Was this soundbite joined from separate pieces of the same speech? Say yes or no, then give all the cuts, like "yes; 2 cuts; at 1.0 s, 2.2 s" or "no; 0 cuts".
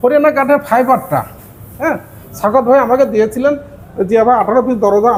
no; 0 cuts